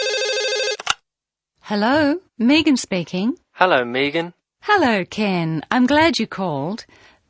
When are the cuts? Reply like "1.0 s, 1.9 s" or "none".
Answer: 1.1 s